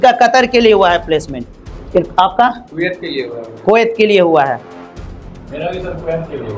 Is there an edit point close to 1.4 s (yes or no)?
yes